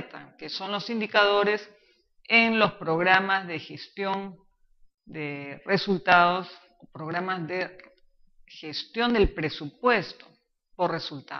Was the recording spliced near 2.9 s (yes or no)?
no